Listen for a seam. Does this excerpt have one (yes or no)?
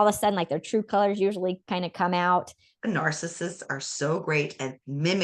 yes